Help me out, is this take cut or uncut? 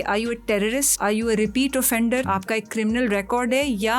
cut